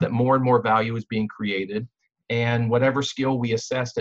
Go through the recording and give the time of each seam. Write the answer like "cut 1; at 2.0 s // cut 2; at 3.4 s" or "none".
none